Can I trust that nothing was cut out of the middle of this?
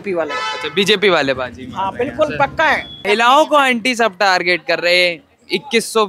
no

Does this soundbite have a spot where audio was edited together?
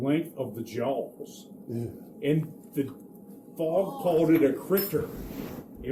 no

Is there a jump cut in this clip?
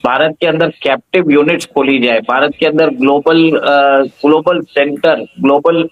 no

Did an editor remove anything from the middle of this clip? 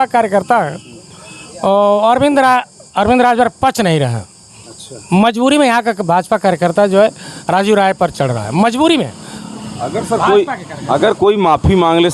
no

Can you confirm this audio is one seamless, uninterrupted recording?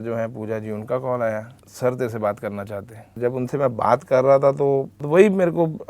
no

